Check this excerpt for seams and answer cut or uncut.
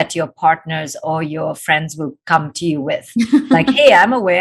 uncut